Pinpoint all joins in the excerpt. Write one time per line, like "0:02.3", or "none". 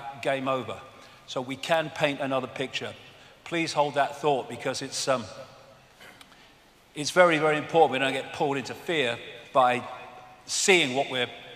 0:05.2